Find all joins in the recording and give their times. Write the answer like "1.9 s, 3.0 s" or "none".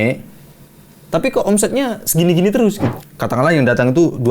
3.0 s